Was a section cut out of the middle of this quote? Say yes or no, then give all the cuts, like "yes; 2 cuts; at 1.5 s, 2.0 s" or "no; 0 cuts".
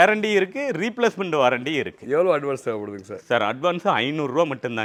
no; 0 cuts